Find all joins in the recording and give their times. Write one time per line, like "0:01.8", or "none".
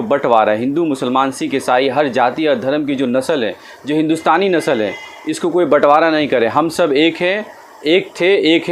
none